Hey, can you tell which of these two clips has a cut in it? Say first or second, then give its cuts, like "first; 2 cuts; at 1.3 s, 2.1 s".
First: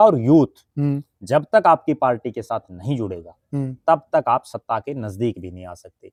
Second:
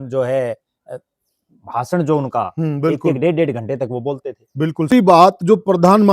second; 1 cut; at 4.9 s